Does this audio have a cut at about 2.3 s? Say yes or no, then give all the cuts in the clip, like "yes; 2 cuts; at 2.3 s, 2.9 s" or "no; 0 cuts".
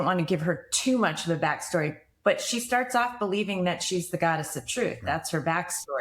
no; 0 cuts